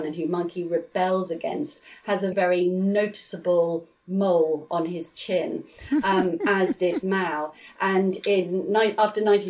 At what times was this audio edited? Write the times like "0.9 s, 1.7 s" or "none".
2.3 s